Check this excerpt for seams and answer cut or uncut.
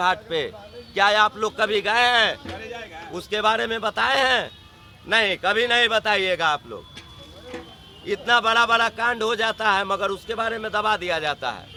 uncut